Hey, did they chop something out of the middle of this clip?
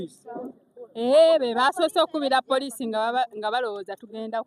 no; 0 cuts

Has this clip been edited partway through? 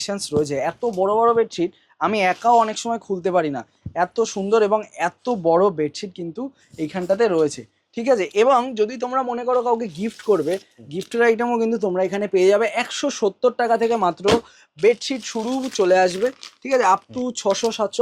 no; 0 cuts

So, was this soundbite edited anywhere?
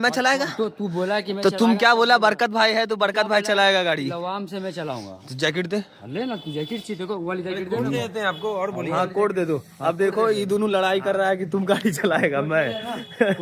no; 0 cuts

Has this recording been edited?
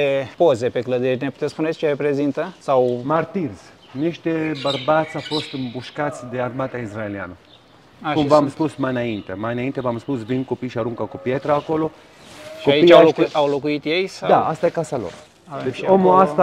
no; 0 cuts

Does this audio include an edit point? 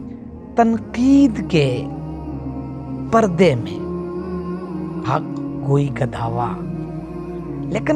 yes; 2 cuts; at 3.6 s, 5.6 s

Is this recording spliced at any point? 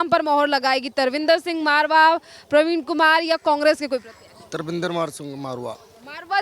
no; 0 cuts

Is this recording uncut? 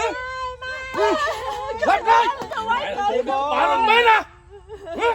no; 1 cut; at 2.5 s

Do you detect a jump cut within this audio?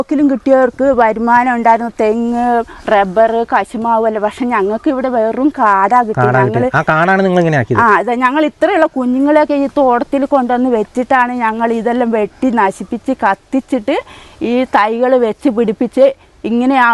no; 0 cuts

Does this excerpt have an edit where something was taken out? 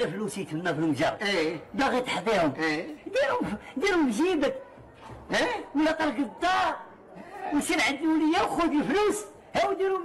no; 0 cuts

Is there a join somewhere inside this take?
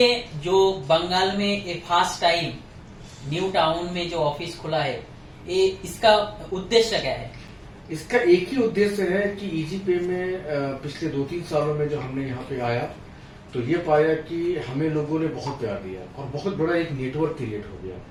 no; 0 cuts

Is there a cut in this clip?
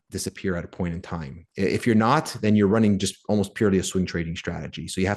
no; 0 cuts

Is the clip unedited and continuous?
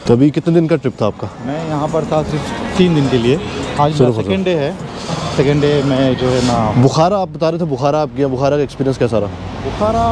yes; 0 cuts

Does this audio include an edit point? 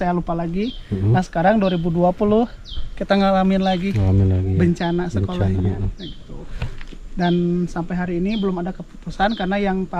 no; 0 cuts

